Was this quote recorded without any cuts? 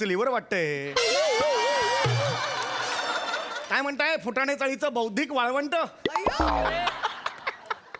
no; 1 cut; at 3.6 s

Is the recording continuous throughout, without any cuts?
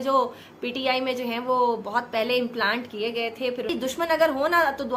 no; 1 cut; at 3.7 s

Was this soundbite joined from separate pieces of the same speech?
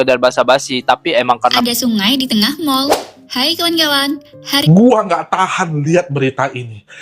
yes; 2 cuts; at 1.6 s, 4.6 s

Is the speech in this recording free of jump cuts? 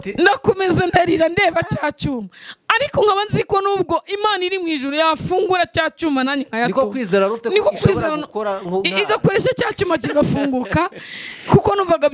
yes; 0 cuts

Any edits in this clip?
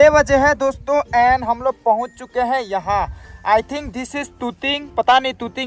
no; 0 cuts

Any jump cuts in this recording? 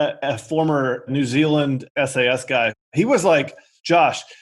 yes; 3 cuts; at 1.1 s, 1.9 s, 2.9 s

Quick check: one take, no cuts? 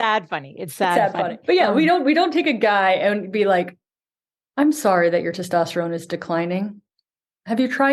no; 1 cut; at 1.4 s

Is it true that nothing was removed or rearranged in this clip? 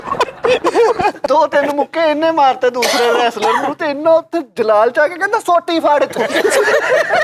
no; 1 cut; at 1.2 s

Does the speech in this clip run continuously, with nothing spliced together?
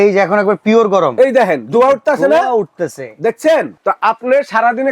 no; 1 cut; at 3.7 s

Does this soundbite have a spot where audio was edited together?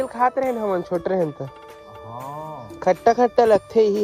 no; 0 cuts

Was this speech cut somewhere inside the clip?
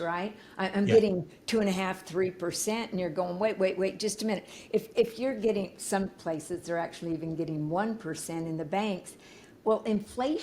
no; 0 cuts

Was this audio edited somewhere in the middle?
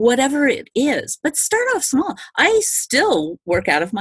no; 0 cuts

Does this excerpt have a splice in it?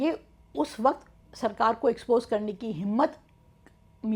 no; 0 cuts

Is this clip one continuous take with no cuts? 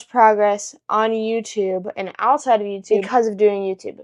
yes; 0 cuts

